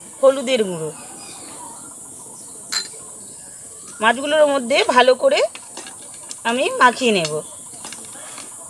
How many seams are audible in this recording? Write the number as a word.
zero